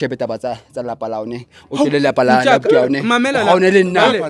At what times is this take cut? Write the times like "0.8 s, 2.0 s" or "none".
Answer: none